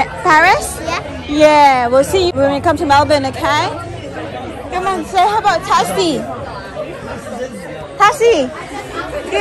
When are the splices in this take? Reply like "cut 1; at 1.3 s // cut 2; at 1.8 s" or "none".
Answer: cut 1; at 2.3 s